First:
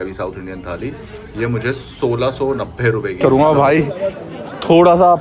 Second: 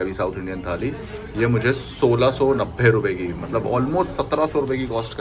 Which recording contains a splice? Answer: first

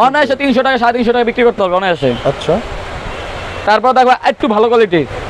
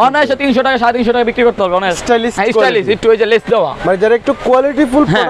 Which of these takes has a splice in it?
second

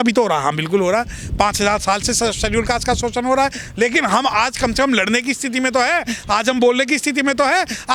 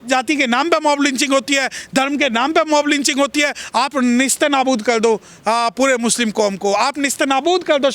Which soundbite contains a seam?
second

